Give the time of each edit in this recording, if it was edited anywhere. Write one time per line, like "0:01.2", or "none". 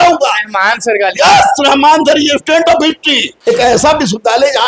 0:03.3